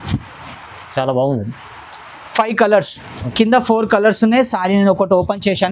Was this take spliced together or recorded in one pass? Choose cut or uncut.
uncut